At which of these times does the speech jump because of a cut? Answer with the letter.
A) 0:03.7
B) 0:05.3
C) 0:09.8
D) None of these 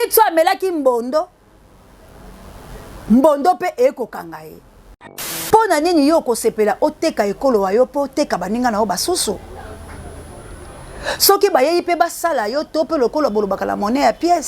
B